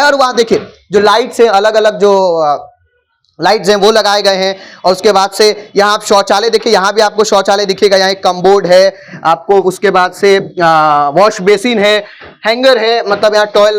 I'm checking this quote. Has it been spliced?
no; 0 cuts

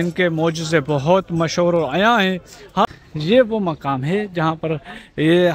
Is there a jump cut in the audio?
yes; 1 cut; at 2.8 s

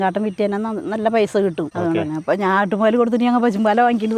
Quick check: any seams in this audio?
yes; 1 cut; at 1.7 s

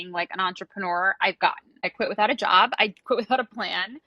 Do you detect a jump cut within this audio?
yes; 1 cut; at 1.9 s

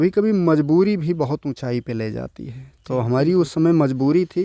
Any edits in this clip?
no; 0 cuts

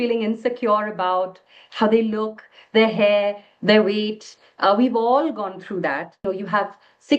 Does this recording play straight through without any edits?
no; 1 cut; at 6.2 s

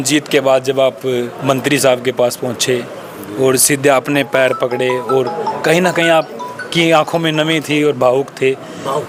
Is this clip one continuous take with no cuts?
yes; 0 cuts

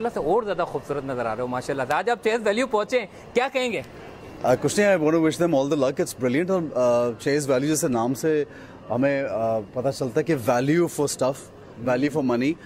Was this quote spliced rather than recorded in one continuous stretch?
no; 0 cuts

